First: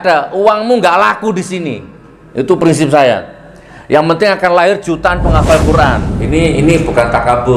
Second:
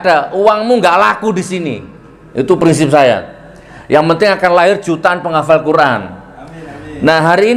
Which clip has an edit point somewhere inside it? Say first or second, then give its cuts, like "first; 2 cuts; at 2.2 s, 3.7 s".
first; 1 cut; at 6.1 s